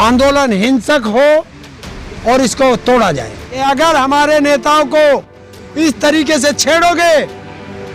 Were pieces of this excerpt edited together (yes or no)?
yes